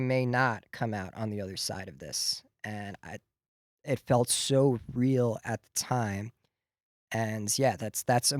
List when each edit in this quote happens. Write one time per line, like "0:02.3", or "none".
none